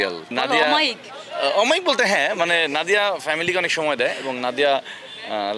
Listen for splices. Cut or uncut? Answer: uncut